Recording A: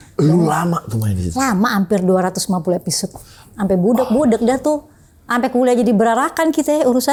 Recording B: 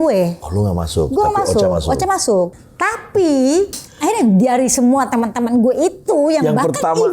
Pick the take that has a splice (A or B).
B